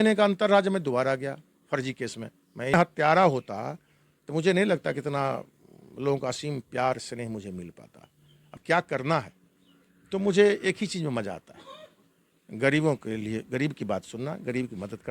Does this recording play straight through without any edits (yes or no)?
no